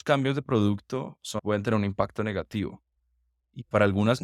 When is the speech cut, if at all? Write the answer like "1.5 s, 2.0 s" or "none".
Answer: 1.3 s